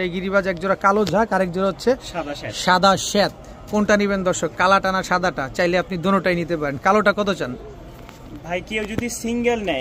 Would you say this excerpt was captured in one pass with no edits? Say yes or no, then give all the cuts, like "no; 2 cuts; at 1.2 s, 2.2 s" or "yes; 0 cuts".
yes; 0 cuts